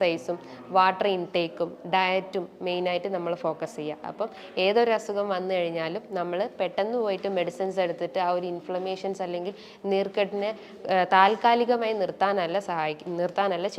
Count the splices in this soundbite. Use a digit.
0